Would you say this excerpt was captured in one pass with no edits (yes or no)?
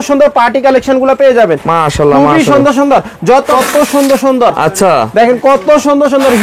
no